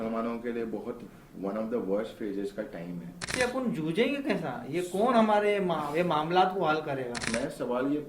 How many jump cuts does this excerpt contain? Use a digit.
2